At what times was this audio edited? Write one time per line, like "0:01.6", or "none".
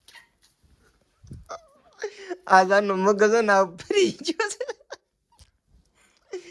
none

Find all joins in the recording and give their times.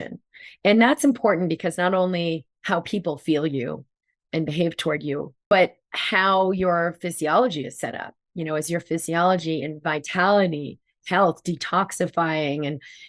0:05.4

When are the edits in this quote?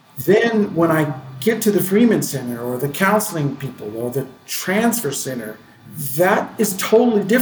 none

